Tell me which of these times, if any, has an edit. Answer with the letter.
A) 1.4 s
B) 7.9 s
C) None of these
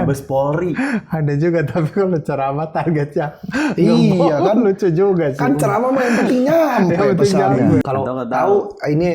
B